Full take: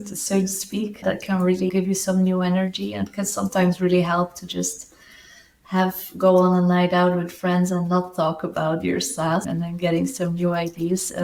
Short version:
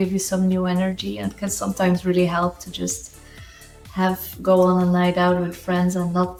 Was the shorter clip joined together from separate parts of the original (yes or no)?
no